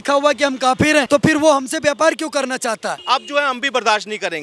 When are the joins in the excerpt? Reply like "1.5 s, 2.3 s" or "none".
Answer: 1.1 s, 3.0 s